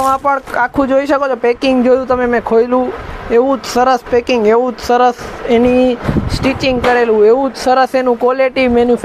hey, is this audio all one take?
yes; 0 cuts

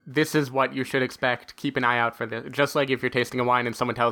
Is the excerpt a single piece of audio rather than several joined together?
yes; 0 cuts

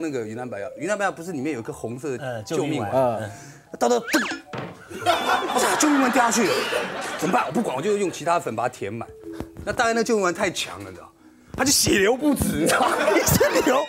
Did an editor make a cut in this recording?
no; 0 cuts

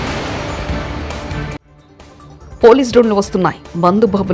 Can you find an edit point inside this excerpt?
yes; 1 cut; at 1.3 s

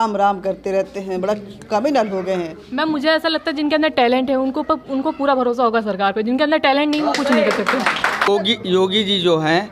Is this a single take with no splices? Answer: no; 1 cut; at 8.3 s

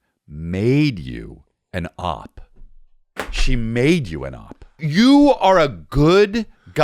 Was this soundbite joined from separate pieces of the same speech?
yes; 1 cut; at 4.8 s

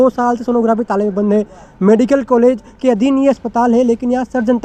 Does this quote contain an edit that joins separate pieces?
no; 0 cuts

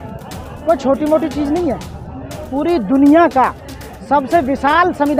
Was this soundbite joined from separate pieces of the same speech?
no; 0 cuts

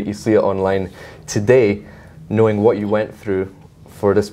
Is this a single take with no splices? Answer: yes; 0 cuts

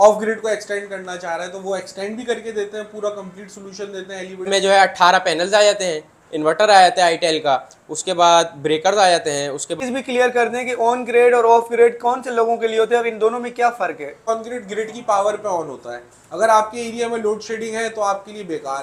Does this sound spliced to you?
yes; 3 cuts; at 4.5 s, 9.7 s, 14.3 s

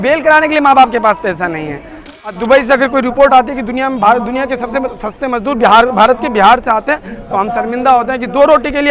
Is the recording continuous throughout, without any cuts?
no; 1 cut; at 2.1 s

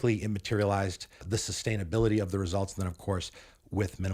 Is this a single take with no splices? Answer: no; 1 cut; at 1.2 s

